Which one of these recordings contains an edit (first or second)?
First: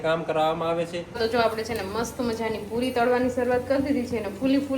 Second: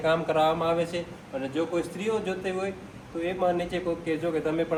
first